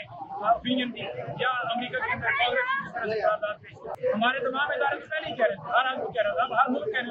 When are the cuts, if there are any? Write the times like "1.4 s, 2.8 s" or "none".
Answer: 4.0 s